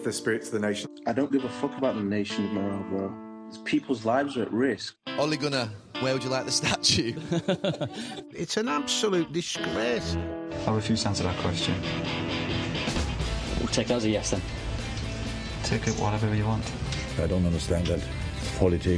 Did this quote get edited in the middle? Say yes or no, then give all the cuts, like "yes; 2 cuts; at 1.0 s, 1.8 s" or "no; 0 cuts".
no; 0 cuts